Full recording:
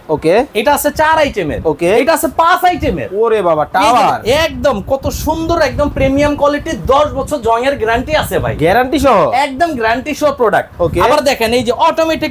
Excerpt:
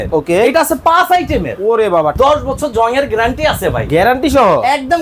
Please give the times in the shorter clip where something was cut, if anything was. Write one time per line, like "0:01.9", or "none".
0:02.1